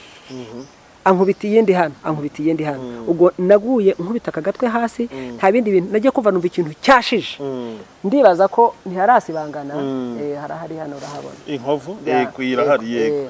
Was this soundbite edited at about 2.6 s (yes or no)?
no